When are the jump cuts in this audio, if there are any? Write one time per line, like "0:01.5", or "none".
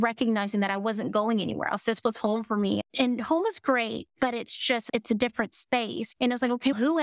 0:06.0